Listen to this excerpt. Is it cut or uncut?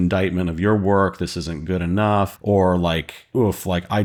uncut